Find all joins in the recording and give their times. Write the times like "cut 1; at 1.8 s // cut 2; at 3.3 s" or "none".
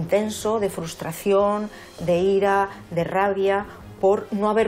none